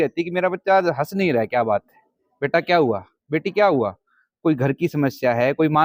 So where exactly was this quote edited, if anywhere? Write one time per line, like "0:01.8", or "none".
none